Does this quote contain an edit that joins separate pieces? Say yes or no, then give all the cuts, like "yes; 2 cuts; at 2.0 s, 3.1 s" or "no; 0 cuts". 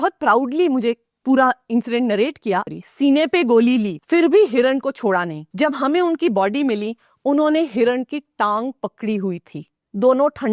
yes; 3 cuts; at 2.7 s, 4.0 s, 5.4 s